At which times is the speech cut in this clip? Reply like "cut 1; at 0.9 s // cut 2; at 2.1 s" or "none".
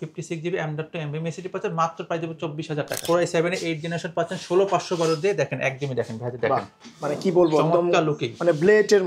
cut 1; at 3.0 s